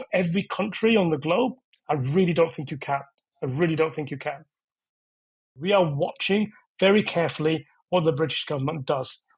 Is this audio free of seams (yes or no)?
no